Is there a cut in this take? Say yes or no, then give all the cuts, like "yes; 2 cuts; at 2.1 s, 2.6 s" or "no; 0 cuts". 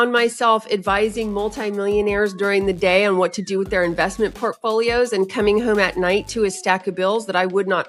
no; 0 cuts